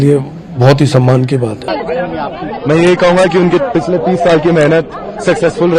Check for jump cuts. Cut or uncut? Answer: cut